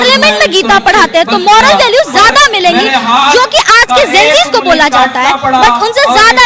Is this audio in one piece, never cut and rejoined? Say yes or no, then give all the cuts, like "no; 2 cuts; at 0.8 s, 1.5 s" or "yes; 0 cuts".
yes; 0 cuts